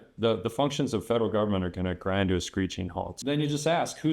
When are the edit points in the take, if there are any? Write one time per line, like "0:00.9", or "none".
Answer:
0:03.1